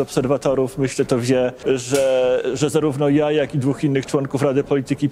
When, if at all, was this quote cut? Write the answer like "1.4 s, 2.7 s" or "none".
1.6 s